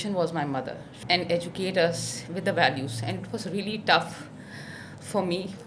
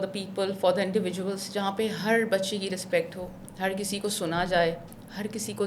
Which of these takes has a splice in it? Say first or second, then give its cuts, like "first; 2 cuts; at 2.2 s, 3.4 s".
first; 1 cut; at 0.9 s